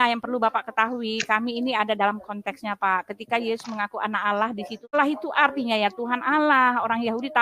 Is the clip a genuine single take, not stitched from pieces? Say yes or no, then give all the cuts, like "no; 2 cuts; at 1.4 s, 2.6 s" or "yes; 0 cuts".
no; 1 cut; at 4.9 s